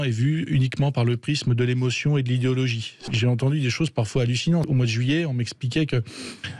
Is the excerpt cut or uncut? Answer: cut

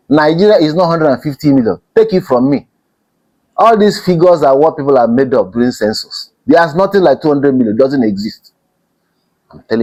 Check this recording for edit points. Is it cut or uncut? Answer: uncut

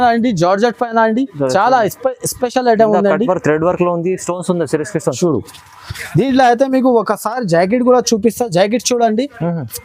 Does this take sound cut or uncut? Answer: uncut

